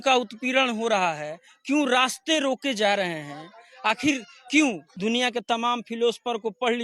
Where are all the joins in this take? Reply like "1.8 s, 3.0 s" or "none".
4.9 s